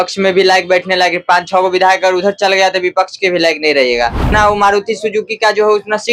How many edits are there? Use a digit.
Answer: 1